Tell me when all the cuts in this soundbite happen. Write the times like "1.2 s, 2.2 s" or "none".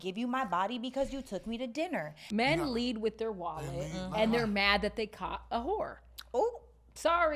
2.2 s